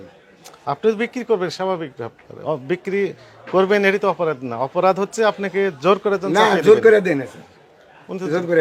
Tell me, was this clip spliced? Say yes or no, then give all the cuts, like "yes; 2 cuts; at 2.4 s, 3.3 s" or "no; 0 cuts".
no; 0 cuts